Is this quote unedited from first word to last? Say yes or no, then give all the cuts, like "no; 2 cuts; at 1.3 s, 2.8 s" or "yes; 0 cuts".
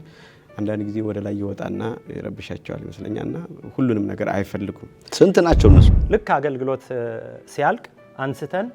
no; 1 cut; at 6.0 s